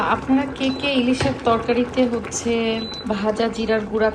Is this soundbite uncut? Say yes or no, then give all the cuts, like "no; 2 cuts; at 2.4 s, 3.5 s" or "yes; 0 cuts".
no; 1 cut; at 2.9 s